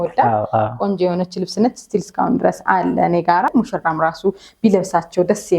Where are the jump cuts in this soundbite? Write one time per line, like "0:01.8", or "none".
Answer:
0:03.5